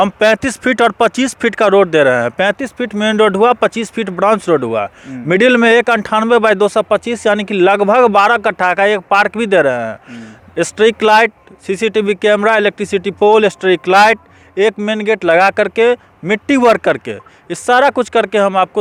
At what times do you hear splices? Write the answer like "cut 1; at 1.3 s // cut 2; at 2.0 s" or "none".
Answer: none